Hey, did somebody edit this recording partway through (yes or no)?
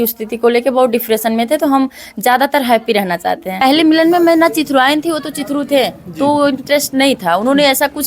yes